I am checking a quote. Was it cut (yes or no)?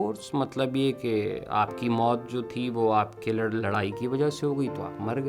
no